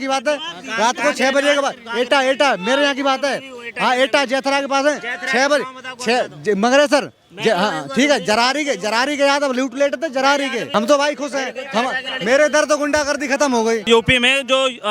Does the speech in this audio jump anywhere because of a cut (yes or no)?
yes